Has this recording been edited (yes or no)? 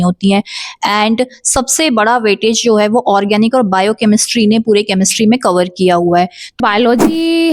yes